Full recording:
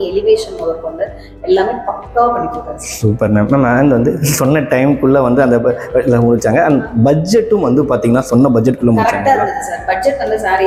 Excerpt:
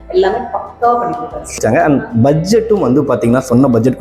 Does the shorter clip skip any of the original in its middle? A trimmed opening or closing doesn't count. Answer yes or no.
yes